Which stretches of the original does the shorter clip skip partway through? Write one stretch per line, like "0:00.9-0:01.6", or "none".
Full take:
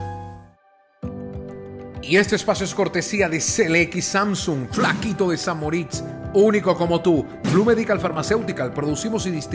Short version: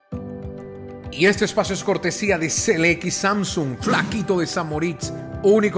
none